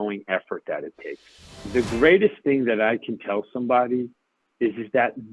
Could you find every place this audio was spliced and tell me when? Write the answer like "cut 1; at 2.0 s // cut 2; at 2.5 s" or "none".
cut 1; at 1.6 s